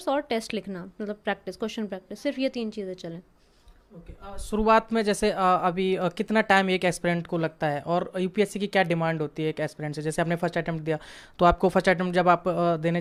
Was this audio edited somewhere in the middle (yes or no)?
no